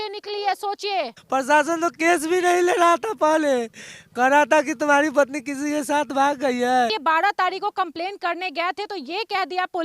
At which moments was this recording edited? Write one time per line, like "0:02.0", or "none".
0:01.2
0:06.9